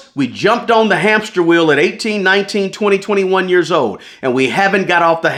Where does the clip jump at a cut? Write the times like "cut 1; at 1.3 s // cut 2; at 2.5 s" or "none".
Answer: none